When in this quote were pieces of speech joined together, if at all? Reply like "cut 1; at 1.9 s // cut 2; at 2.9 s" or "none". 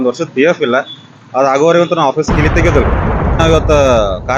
cut 1; at 3.4 s